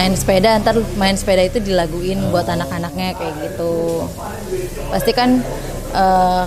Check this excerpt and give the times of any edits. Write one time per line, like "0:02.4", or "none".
none